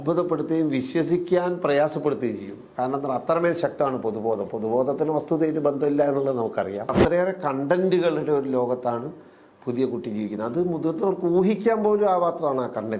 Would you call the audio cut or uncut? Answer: cut